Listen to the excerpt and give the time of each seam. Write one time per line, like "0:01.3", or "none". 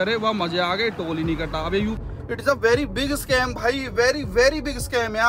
0:02.0